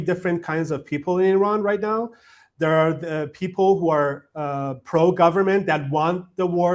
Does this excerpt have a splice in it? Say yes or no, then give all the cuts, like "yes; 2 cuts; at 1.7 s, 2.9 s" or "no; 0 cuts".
no; 0 cuts